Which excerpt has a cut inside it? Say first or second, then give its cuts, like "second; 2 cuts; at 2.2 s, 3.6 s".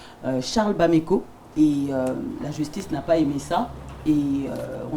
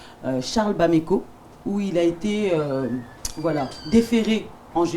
first; 1 cut; at 1.4 s